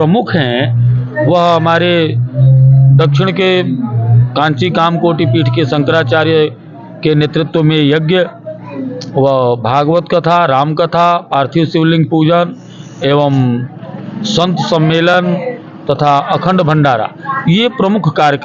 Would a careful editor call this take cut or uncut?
uncut